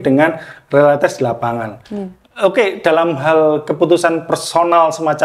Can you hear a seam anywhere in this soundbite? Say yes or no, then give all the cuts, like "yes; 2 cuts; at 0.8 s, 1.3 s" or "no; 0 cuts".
no; 0 cuts